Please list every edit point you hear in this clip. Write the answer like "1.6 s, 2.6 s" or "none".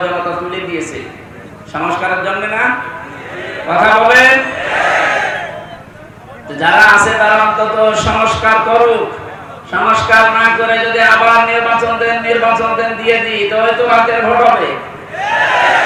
none